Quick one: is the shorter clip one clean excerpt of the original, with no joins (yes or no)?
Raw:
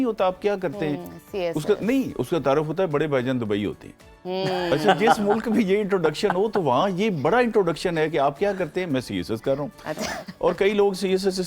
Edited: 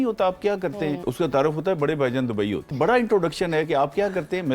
no